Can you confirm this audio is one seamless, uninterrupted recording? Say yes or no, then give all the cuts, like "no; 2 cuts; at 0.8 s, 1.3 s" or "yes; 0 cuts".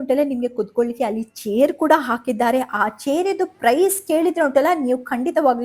yes; 0 cuts